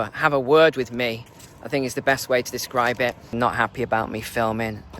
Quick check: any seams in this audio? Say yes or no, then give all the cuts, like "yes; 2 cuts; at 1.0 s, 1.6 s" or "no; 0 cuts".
yes; 1 cut; at 3.3 s